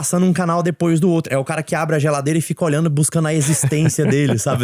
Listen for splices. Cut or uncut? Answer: uncut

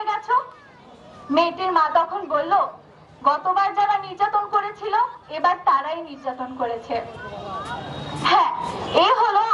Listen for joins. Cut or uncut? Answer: uncut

